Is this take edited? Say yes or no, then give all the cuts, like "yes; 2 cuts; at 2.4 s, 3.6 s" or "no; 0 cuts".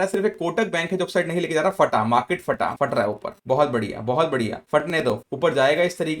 yes; 2 cuts; at 2.7 s, 5.2 s